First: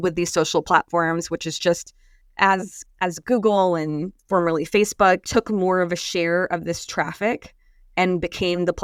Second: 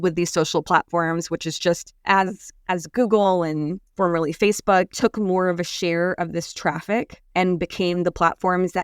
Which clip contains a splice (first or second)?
second